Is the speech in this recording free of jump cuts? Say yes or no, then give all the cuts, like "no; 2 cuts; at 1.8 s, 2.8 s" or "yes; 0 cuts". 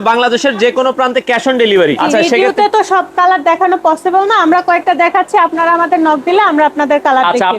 no; 1 cut; at 2.0 s